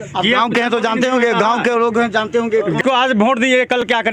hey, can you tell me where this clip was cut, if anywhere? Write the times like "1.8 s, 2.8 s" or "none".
2.8 s